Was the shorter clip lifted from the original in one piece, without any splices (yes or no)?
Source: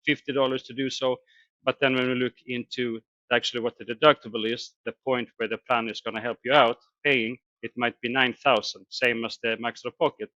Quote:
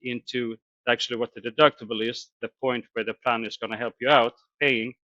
yes